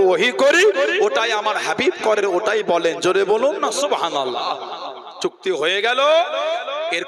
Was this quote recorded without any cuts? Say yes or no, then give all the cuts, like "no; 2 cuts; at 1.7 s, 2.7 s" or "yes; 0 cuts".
yes; 0 cuts